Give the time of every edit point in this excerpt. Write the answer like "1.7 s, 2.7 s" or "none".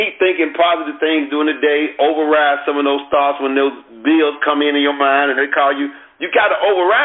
none

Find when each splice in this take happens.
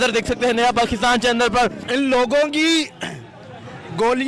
1.8 s

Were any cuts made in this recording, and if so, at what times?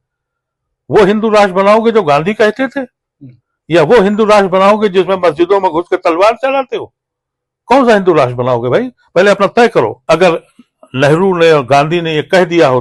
10.0 s

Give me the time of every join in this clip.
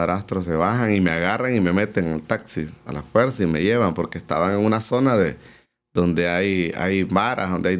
none

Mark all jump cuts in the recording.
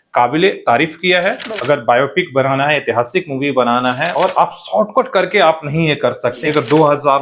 1.5 s, 4.1 s, 6.4 s

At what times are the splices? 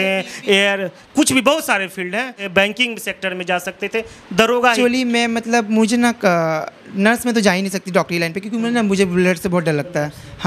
2.4 s, 4.8 s

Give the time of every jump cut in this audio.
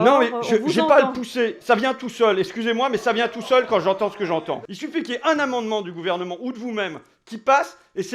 4.7 s

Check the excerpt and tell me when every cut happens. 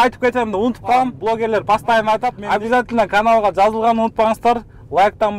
1.1 s, 2.4 s

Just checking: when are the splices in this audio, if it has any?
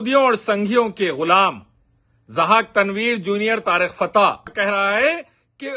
4.5 s

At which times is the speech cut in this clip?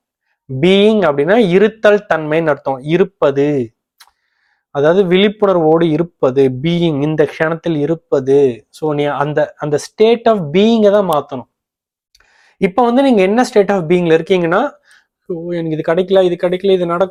none

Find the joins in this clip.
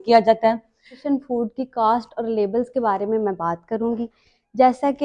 1.0 s

